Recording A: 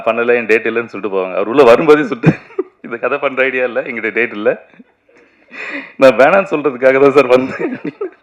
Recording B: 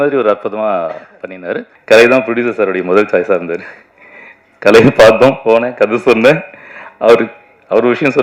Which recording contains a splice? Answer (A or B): B